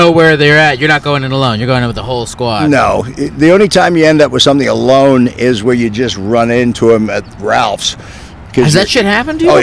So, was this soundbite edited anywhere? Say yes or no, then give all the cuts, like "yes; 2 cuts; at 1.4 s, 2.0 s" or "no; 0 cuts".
no; 0 cuts